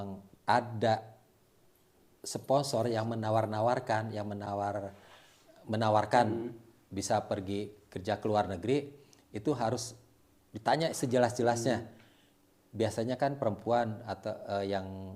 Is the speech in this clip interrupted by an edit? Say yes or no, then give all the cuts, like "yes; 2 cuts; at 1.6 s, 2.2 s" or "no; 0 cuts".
no; 0 cuts